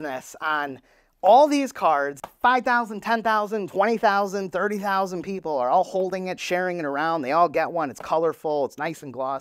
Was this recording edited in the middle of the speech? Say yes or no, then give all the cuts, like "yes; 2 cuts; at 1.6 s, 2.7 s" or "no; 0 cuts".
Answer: no; 0 cuts